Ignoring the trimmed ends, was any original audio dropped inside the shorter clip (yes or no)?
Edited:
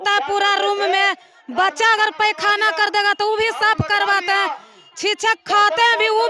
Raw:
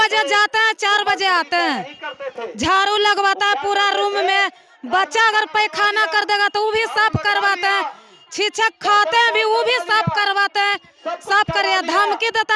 no